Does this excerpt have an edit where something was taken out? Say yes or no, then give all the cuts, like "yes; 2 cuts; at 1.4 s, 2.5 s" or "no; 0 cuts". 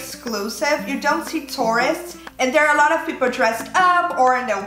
no; 0 cuts